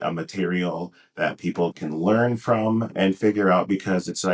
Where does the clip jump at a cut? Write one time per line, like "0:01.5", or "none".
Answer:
0:01.7
0:02.9